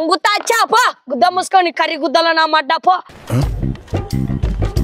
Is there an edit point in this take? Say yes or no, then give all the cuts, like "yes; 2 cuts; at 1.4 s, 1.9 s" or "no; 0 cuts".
no; 0 cuts